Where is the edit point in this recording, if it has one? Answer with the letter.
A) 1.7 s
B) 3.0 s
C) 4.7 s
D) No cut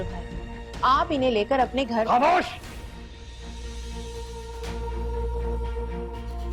D